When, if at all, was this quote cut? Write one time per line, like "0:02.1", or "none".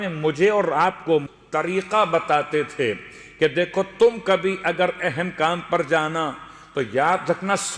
0:01.3

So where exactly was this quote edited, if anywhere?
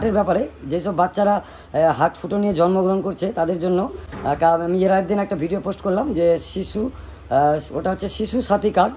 none

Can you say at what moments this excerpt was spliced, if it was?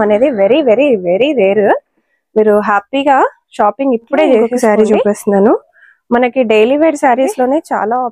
0:04.5

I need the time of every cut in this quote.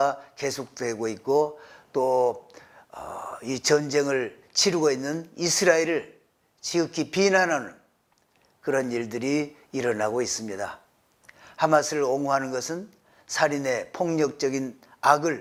none

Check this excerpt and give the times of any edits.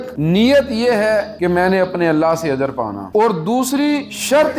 none

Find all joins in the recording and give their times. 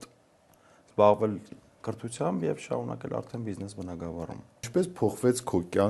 0:04.6

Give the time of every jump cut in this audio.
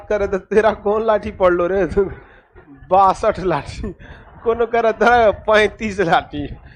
none

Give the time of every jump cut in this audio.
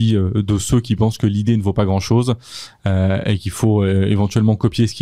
none

